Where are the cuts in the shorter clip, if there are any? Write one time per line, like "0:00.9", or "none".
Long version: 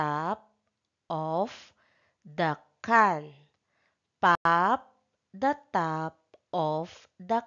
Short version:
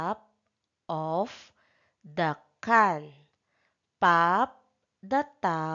0:04.1